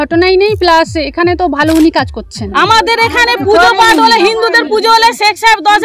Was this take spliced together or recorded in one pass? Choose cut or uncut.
cut